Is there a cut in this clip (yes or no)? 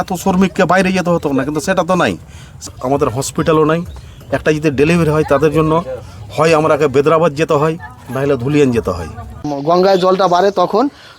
yes